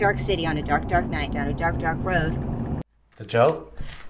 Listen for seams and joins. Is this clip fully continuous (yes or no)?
no